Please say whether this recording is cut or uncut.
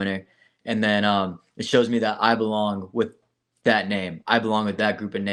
uncut